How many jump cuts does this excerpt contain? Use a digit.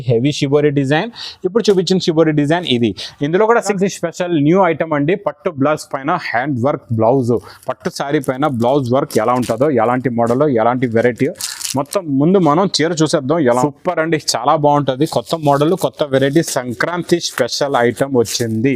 2